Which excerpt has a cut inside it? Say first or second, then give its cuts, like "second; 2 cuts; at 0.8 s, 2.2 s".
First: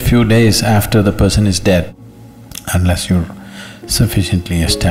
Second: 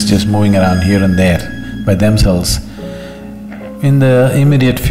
first; 1 cut; at 1.9 s